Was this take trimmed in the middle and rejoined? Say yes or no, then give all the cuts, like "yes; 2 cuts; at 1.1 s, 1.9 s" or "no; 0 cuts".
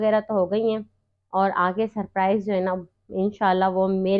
no; 0 cuts